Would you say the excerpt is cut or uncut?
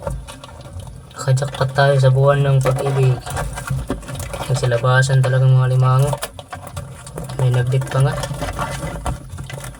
uncut